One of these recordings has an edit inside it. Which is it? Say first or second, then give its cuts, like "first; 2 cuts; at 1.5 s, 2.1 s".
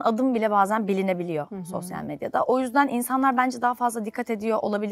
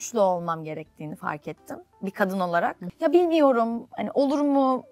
second; 1 cut; at 2.8 s